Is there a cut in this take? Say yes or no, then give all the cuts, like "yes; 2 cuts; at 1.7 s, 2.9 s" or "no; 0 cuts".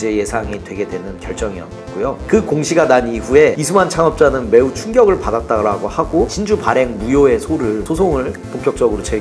yes; 1 cut; at 6.3 s